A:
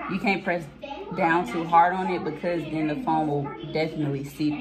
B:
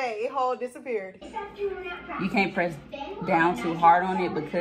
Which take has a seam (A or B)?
B